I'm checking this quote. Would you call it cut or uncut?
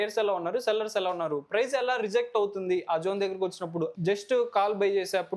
cut